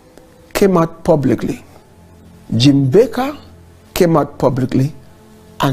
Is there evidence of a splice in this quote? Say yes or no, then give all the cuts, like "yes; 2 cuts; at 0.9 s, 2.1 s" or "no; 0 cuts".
no; 0 cuts